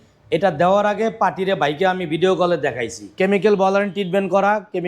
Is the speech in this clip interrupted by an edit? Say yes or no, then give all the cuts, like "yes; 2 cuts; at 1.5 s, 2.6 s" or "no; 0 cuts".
yes; 1 cut; at 3.1 s